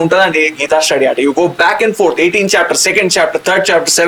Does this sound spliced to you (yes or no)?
no